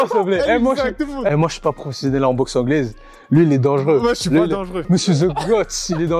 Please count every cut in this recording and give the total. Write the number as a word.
one